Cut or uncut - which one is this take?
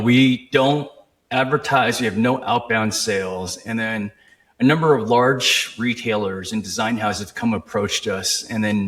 uncut